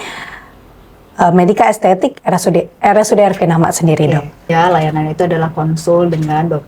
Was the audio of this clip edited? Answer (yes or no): yes